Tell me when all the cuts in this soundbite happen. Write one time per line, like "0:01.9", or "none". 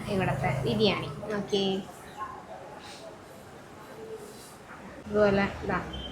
0:05.0